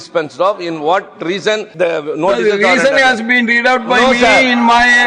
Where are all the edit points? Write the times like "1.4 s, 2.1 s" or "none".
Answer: 1.7 s